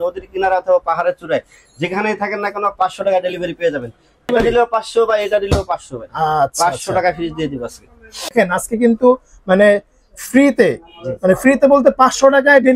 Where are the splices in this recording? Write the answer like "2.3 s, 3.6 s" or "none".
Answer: 4.3 s, 8.3 s